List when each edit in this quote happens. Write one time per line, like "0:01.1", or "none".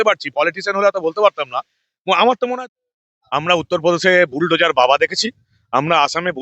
0:02.6